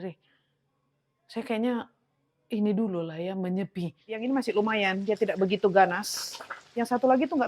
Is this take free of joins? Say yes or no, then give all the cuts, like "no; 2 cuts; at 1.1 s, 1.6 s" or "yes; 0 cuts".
no; 1 cut; at 4.2 s